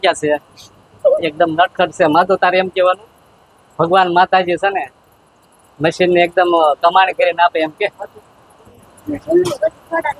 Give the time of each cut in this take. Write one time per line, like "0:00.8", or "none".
none